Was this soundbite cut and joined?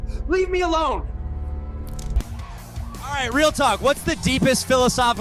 yes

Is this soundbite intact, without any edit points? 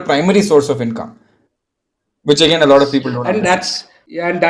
yes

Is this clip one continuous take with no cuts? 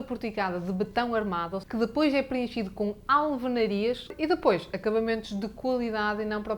no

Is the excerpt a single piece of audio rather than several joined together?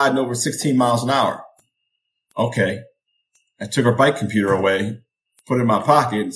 yes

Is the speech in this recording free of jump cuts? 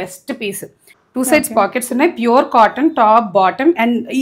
yes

